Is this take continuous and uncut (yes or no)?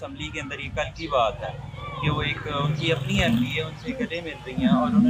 yes